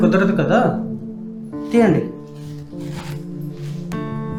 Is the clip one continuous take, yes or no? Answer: yes